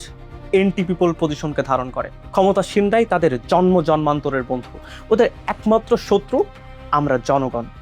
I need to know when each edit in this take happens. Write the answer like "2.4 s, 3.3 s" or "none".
4.9 s

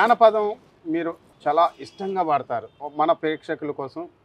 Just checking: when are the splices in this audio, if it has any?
1.2 s, 2.8 s

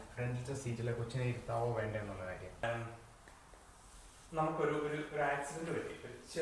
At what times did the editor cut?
2.6 s

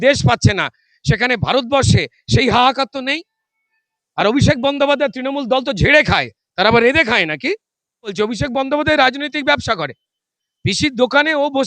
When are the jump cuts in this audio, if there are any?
8.1 s

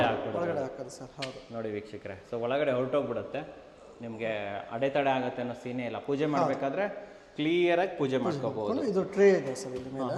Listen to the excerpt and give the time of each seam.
none

